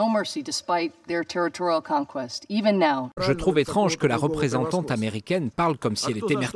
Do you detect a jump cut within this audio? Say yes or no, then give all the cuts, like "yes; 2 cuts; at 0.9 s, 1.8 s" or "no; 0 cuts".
yes; 1 cut; at 3.2 s